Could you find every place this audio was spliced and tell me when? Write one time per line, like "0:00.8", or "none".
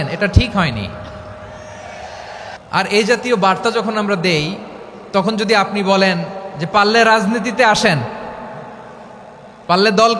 0:02.6